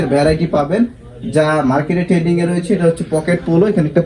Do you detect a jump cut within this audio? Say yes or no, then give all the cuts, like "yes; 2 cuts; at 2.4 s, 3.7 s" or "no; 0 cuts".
no; 0 cuts